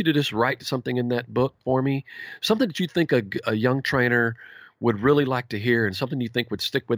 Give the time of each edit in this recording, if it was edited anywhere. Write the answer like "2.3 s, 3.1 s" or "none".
none